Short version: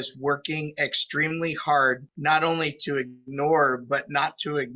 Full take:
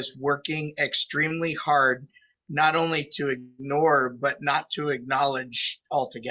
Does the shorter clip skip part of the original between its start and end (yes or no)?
yes